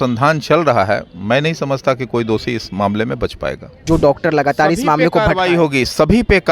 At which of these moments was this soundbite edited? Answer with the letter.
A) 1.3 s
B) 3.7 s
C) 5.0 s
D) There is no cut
B